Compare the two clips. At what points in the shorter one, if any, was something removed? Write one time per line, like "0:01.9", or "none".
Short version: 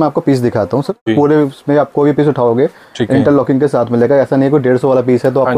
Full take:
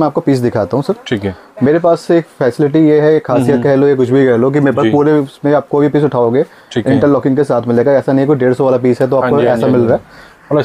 0:01.1